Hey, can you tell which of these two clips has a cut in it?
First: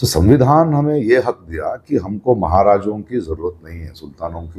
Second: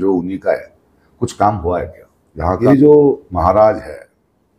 second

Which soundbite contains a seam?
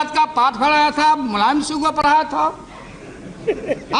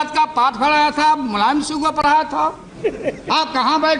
second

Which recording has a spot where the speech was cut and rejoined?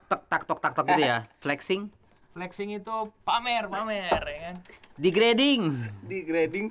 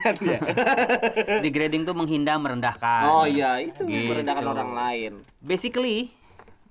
first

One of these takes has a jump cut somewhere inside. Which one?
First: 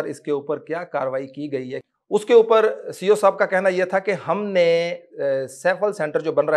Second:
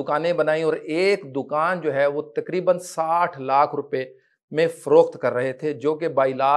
first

